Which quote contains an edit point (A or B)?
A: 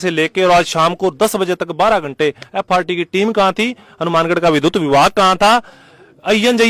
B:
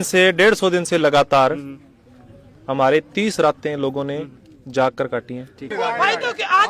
B